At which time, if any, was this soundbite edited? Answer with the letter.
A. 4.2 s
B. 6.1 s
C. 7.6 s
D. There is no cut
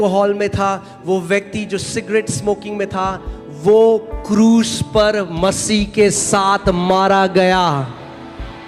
D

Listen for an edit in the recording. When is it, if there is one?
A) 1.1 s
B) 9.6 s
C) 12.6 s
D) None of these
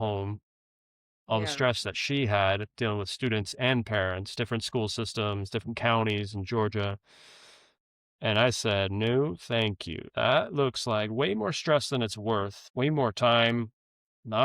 C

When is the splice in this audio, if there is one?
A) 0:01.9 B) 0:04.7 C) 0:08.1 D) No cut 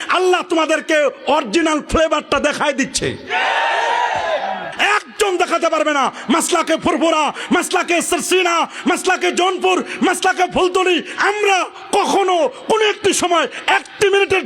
B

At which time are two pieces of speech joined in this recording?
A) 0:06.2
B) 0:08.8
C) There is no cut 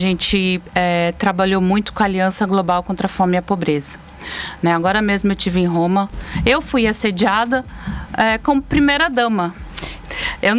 A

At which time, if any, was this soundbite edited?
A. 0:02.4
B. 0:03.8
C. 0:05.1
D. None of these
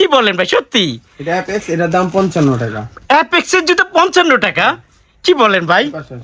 D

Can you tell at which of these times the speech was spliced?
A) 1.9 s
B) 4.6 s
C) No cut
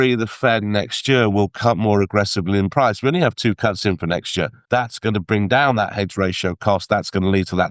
B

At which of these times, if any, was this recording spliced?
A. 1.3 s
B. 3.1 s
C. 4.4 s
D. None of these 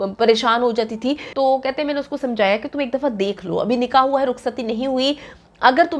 A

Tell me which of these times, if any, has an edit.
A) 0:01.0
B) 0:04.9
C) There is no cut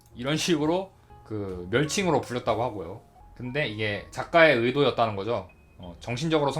C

